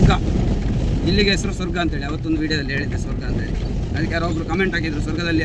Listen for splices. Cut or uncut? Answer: uncut